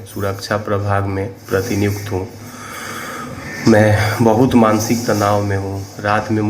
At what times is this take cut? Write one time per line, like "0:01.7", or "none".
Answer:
none